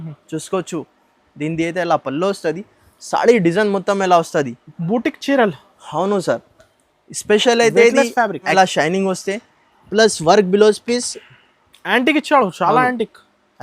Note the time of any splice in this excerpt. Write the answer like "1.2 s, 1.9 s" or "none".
8.5 s

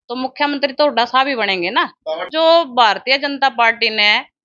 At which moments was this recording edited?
2.2 s

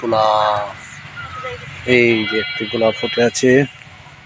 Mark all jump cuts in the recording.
1.7 s

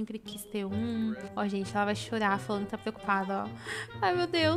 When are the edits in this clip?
1.2 s

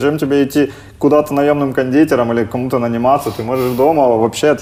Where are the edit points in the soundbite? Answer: none

